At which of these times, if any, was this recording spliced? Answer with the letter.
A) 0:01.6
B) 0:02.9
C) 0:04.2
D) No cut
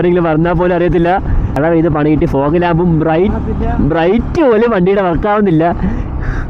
A